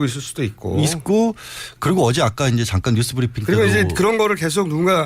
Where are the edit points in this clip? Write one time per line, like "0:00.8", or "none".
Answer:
none